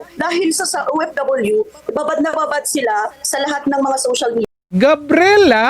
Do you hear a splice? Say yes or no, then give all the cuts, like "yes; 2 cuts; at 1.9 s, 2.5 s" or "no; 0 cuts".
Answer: yes; 1 cut; at 4.5 s